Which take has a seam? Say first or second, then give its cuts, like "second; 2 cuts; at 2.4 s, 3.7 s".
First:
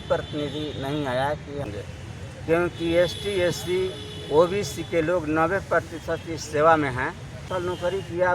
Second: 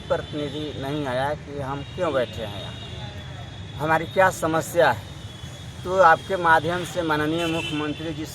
first; 2 cuts; at 1.7 s, 7.5 s